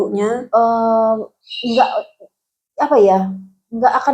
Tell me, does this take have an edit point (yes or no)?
no